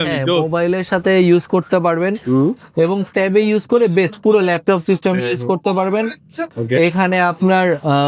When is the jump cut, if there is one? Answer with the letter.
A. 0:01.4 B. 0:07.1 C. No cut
C